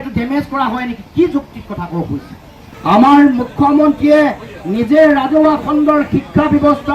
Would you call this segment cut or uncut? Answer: cut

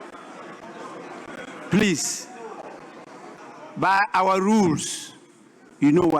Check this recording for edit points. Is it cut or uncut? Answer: cut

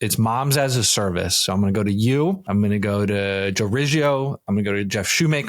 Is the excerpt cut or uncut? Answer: cut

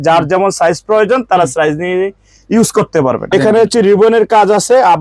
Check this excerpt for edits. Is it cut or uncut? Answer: cut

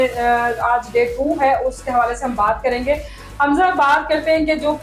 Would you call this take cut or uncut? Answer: uncut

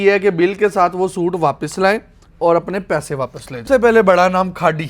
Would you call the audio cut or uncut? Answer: cut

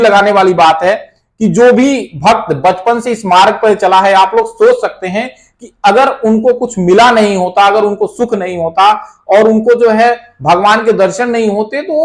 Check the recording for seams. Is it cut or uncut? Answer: uncut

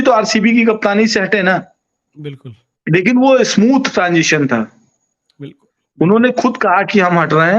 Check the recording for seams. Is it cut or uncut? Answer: uncut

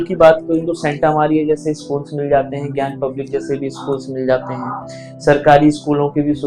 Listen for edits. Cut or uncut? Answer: uncut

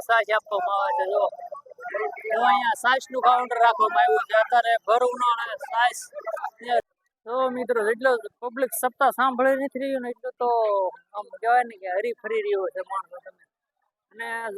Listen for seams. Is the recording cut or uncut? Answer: cut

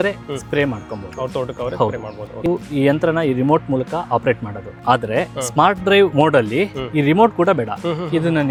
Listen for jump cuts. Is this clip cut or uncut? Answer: uncut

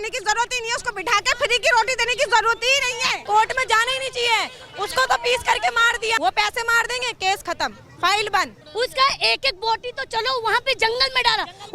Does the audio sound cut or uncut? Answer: cut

